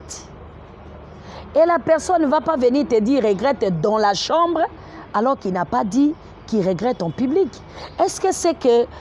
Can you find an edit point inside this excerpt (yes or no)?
no